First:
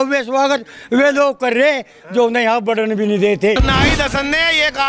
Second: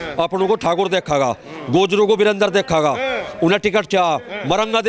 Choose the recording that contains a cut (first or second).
first